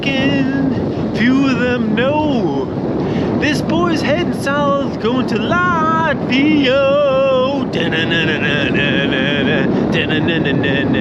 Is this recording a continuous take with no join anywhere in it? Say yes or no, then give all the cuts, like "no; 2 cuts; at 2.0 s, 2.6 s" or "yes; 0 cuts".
yes; 0 cuts